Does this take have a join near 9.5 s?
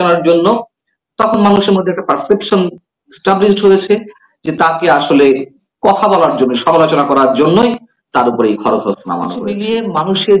yes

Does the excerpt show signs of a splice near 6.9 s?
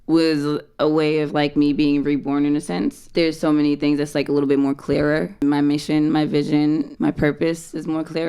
yes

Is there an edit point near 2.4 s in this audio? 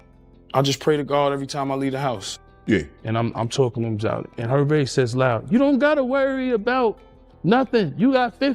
yes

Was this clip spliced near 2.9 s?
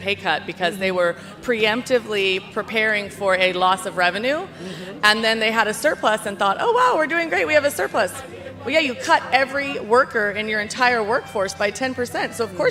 no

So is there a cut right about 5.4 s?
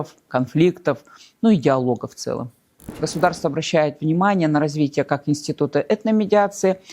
no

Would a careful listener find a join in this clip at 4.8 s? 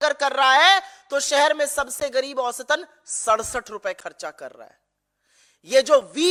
no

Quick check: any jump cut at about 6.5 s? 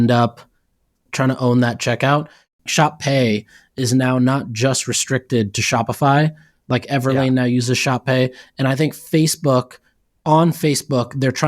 no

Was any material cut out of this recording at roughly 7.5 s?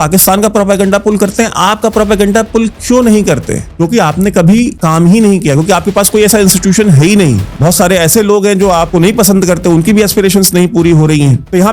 yes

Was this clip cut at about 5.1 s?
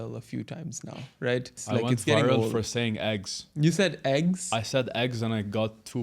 no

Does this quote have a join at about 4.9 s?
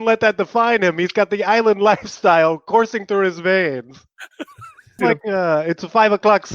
yes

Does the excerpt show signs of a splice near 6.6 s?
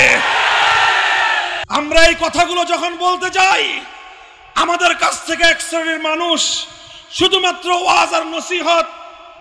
no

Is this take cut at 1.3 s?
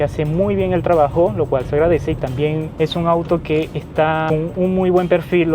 no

